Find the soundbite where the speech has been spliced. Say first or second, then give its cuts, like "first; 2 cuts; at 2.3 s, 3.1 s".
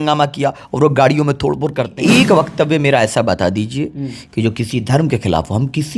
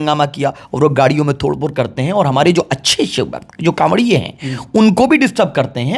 first; 1 cut; at 1.9 s